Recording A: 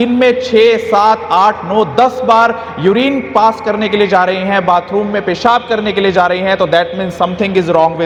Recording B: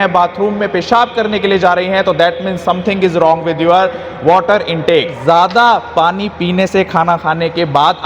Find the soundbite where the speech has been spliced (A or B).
B